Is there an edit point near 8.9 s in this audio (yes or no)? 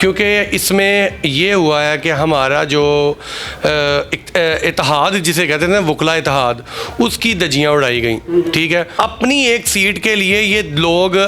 yes